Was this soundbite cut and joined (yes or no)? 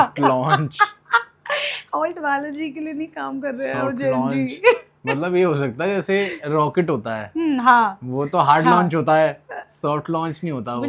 no